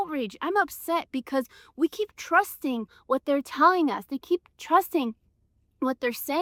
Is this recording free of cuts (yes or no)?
yes